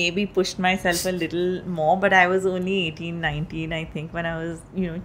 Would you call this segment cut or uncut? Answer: uncut